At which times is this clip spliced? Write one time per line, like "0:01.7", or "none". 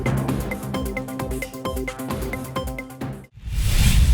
0:03.2